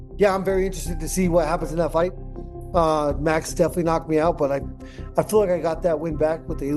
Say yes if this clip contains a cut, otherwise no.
no